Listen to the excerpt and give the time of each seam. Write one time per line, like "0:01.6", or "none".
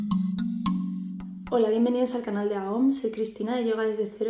0:01.3